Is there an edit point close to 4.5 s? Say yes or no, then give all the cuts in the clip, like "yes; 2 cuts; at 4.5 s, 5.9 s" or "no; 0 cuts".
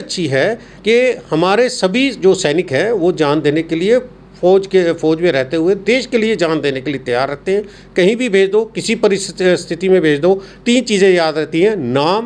no; 0 cuts